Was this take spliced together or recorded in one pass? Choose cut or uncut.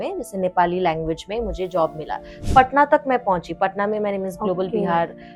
cut